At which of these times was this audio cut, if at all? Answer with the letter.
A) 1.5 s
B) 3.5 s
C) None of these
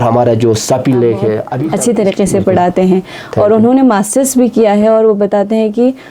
A